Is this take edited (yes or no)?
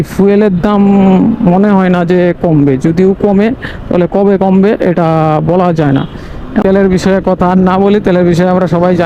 yes